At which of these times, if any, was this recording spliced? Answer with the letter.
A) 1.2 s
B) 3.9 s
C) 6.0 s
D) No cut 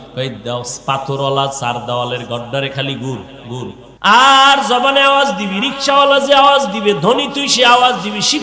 B